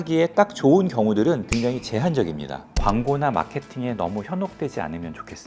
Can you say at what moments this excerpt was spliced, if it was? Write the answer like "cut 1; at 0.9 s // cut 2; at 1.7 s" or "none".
cut 1; at 1.4 s // cut 2; at 2.7 s

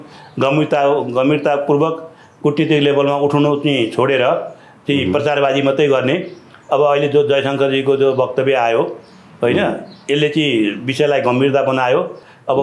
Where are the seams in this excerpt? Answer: none

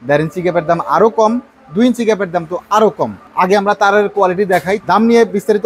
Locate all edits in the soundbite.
cut 1; at 3.2 s // cut 2; at 4.8 s

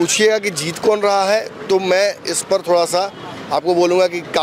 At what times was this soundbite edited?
none

